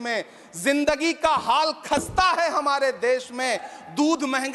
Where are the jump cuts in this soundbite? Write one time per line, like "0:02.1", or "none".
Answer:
none